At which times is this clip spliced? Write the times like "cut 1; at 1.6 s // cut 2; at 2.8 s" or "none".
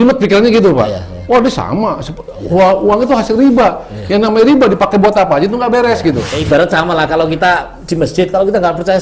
cut 1; at 6.3 s